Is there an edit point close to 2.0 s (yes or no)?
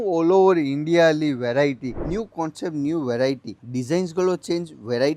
yes